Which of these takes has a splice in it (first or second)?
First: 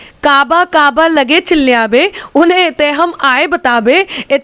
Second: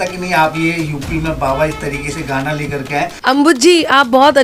second